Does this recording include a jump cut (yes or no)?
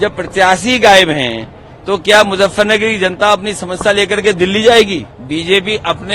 yes